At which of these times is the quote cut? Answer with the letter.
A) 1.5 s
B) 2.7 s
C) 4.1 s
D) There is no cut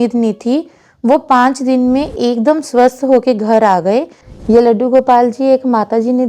C